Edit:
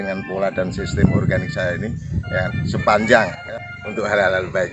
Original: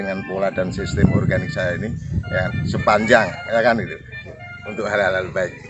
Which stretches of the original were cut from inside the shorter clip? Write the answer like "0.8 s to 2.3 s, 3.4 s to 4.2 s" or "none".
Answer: 3.4 s to 4.2 s